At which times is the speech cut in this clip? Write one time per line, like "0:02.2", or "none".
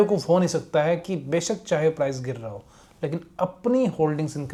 none